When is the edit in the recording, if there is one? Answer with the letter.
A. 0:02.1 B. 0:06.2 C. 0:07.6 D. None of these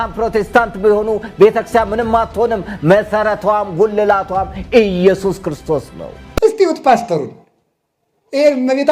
B